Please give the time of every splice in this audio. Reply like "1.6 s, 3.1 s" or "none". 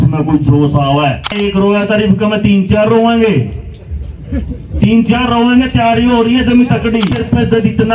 1.3 s, 7.1 s